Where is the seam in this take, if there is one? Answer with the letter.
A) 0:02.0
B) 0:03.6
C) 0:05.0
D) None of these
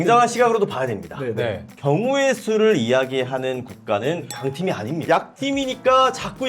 C